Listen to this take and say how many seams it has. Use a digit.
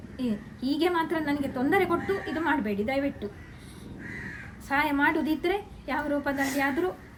0